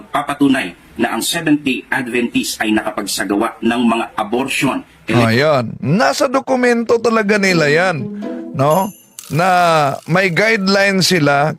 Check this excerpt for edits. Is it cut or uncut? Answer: uncut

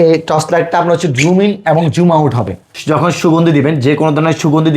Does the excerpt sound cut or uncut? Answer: cut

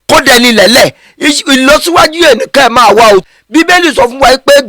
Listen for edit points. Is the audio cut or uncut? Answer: cut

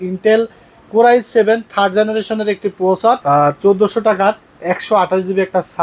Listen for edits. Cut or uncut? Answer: cut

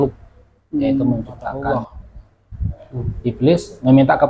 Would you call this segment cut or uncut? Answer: cut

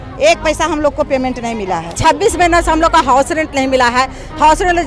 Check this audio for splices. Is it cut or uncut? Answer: cut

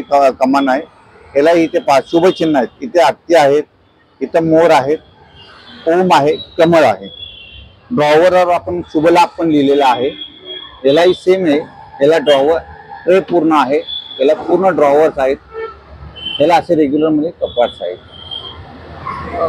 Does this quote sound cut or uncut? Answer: uncut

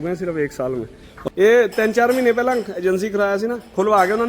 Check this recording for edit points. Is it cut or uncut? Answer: cut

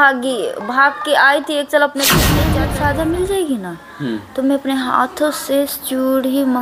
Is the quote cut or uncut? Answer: cut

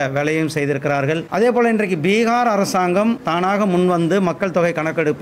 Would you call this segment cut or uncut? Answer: cut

